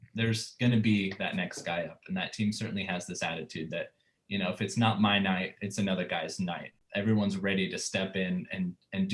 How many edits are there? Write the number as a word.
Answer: one